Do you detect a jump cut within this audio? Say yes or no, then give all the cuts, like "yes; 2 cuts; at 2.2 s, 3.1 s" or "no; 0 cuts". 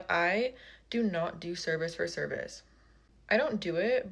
no; 0 cuts